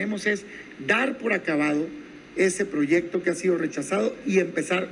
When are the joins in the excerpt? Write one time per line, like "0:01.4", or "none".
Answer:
none